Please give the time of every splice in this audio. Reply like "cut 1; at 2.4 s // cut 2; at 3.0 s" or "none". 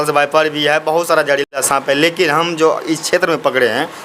none